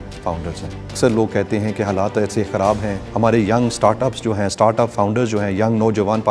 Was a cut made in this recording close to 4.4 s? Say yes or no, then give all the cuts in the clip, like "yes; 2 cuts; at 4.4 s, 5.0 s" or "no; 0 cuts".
no; 2 cuts; at 0.9 s, 3.0 s